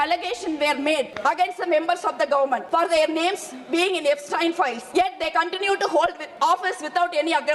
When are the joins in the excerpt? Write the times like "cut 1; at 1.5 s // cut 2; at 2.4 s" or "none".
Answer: cut 1; at 1.1 s // cut 2; at 2.6 s // cut 3; at 4.8 s // cut 4; at 6.2 s